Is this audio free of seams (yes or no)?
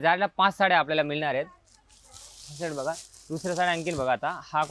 yes